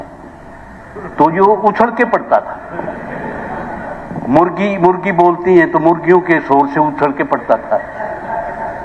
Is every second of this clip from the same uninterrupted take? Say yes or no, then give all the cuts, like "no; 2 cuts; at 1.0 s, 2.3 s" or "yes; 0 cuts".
yes; 0 cuts